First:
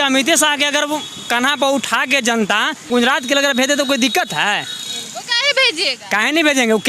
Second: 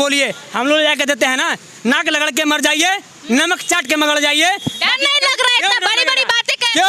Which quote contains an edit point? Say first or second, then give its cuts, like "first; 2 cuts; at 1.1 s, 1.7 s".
first; 1 cut; at 2.9 s